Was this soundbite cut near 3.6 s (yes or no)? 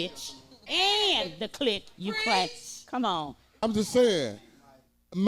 yes